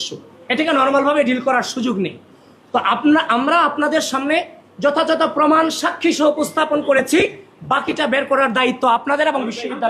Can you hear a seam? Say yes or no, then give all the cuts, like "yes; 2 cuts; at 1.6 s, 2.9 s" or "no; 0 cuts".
no; 0 cuts